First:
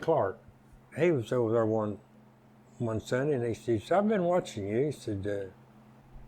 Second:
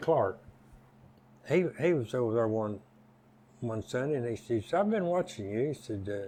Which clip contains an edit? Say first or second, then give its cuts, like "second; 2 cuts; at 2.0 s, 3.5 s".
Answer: first; 1 cut; at 0.9 s